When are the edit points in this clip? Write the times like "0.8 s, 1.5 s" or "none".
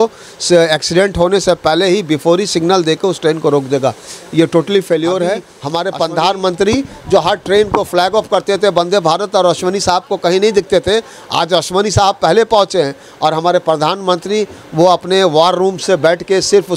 5.5 s

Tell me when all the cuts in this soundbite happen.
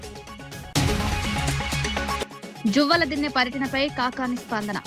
0.7 s, 2.2 s

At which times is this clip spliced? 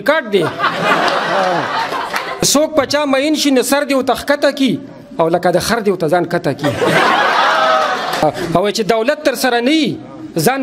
2.4 s, 8.2 s

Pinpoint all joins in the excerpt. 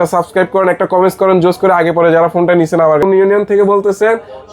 3.0 s

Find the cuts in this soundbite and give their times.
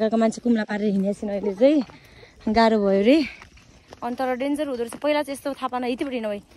none

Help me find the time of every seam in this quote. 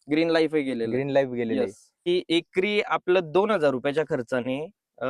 2.0 s

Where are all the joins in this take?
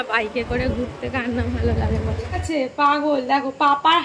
2.4 s

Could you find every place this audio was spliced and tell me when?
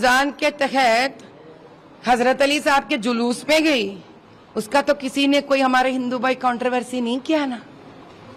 none

